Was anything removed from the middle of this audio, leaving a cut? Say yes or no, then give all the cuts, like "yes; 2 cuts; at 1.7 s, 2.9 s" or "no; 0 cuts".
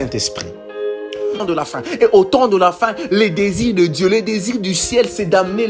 yes; 1 cut; at 1.4 s